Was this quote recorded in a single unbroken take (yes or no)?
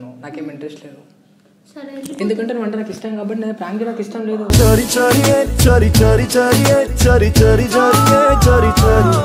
yes